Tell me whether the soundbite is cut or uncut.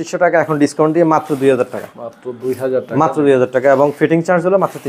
uncut